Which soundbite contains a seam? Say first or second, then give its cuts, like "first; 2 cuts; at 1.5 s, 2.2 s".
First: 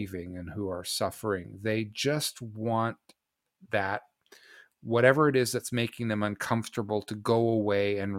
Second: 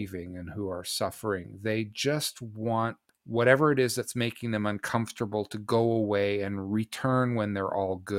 second; 1 cut; at 3.1 s